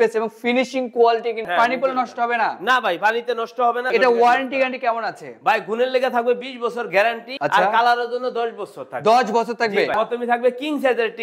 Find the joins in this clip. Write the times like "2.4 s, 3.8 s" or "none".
1.5 s, 3.9 s, 7.3 s, 10.0 s